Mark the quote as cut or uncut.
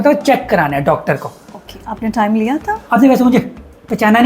cut